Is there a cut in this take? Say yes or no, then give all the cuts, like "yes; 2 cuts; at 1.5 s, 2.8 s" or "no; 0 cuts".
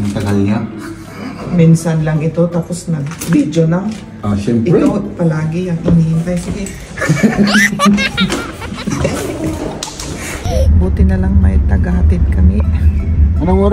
yes; 1 cut; at 10.5 s